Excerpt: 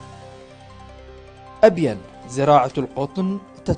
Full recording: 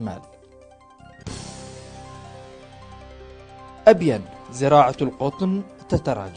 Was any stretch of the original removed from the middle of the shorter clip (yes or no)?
yes